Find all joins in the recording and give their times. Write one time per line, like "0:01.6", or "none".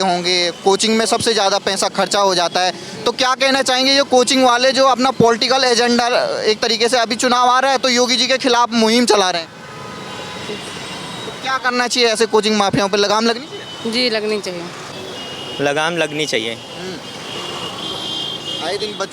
0:14.8